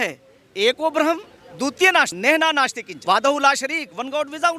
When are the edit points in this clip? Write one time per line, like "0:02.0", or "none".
0:02.1
0:02.9